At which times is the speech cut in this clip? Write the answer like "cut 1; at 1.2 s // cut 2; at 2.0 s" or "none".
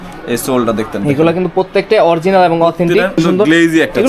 cut 1; at 3.1 s